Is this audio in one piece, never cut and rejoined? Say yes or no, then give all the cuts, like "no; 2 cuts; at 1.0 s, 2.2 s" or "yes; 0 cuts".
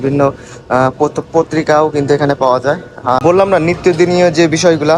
no; 1 cut; at 3.2 s